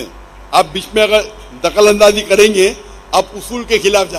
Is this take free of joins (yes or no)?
yes